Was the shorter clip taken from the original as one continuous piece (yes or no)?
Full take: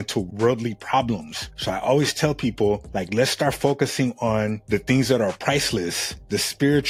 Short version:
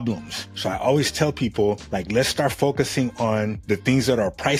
yes